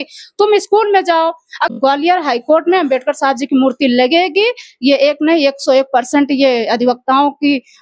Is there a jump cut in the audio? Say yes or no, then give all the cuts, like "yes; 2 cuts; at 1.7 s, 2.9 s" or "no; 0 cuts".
yes; 1 cut; at 1.7 s